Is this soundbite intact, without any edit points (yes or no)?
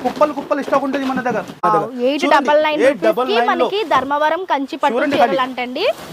no